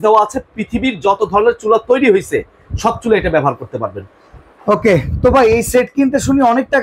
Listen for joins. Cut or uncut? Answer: uncut